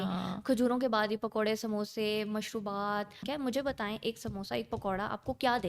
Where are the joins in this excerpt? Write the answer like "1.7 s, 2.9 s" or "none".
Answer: 3.2 s